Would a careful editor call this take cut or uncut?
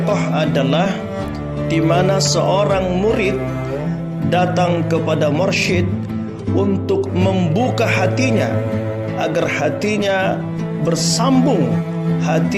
uncut